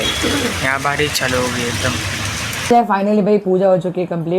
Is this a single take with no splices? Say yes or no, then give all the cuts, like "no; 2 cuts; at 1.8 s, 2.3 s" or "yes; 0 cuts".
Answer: no; 1 cut; at 2.5 s